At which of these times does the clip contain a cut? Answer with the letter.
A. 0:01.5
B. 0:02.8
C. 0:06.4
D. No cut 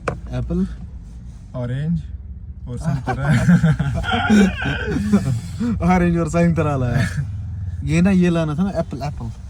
D